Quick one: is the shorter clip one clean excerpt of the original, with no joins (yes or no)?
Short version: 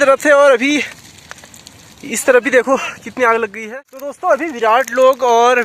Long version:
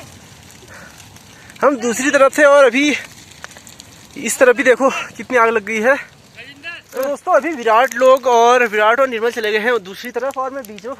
no